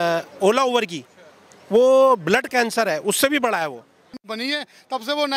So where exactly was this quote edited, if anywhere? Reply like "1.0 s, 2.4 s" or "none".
4.2 s